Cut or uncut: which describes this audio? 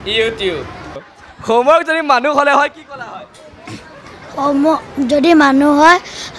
cut